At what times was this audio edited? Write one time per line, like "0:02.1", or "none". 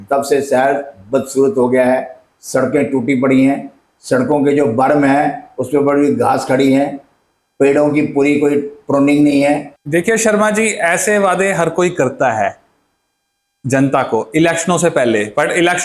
0:09.7

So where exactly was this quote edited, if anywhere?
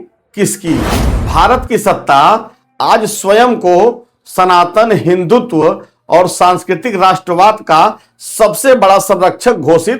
0:01.0

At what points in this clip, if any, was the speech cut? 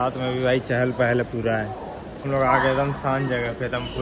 0:02.2

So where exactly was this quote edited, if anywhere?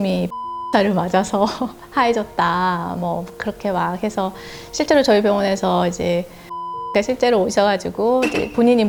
none

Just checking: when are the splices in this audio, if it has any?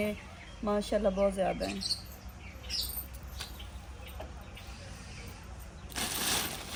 none

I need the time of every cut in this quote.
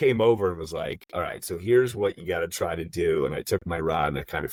none

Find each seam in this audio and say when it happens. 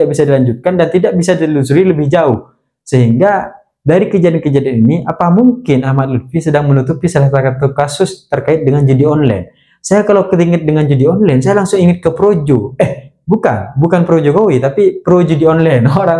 none

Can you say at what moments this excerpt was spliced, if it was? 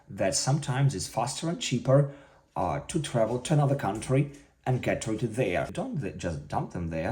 0:05.7

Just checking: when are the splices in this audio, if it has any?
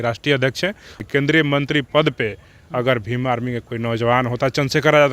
0:01.0

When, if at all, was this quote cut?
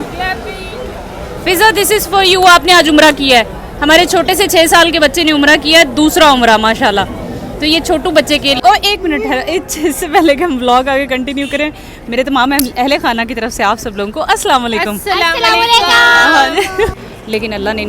0:08.6
0:16.9

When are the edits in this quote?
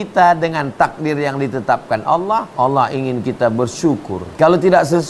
0:02.5
0:04.2

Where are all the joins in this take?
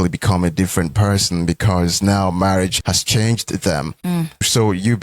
0:02.8
0:03.9

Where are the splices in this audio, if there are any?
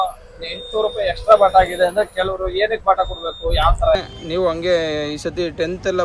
0:04.1

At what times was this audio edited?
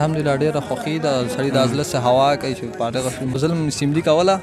0:03.4

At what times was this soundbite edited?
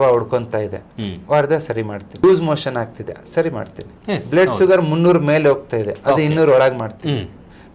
0:02.2

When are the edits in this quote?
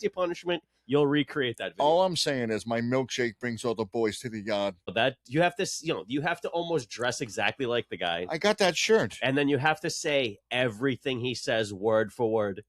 0:04.9

